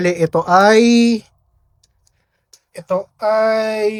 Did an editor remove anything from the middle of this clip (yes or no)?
no